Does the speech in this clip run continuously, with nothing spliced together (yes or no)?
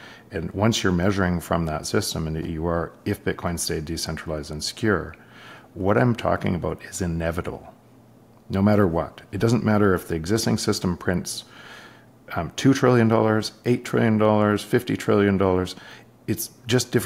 yes